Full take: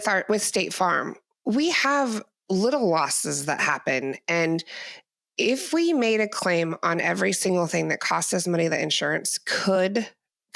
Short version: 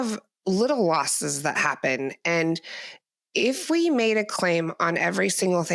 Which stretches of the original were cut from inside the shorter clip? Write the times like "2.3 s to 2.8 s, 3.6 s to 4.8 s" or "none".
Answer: none